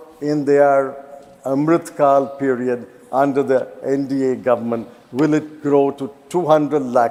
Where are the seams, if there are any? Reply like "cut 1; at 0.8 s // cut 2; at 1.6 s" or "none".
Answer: none